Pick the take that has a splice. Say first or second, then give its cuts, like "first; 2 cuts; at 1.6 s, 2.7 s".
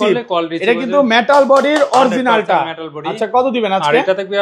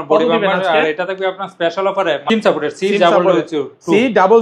second; 1 cut; at 2.3 s